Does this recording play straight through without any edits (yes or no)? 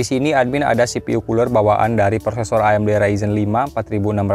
yes